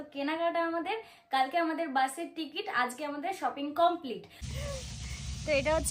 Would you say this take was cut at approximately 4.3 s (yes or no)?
yes